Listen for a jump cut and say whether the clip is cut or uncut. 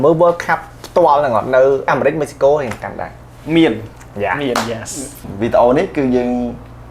cut